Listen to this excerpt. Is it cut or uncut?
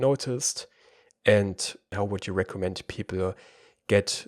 cut